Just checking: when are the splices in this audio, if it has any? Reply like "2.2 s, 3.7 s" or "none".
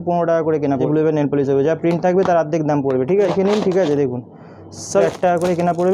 0.8 s, 3.3 s, 5.0 s